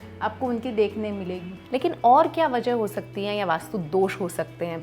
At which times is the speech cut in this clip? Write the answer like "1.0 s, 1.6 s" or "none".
1.5 s